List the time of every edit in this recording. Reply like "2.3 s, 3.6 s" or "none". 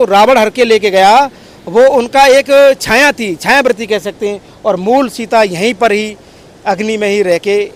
none